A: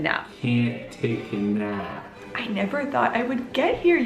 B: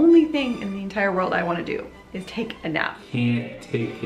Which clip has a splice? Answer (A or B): A